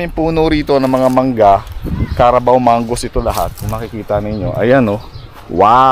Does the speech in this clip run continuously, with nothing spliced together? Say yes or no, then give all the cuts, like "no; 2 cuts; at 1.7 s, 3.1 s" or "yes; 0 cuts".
yes; 0 cuts